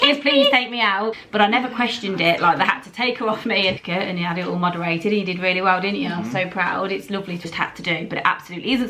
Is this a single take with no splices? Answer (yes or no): no